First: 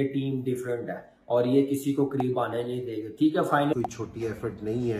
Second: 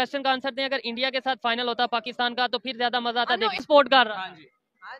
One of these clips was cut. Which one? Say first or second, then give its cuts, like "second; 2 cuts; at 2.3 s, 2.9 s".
first; 1 cut; at 3.7 s